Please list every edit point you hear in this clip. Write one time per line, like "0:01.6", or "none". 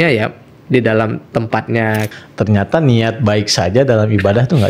0:02.1